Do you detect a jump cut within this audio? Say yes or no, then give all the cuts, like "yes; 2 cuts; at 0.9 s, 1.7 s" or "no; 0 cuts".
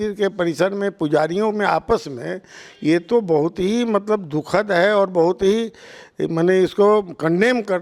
no; 0 cuts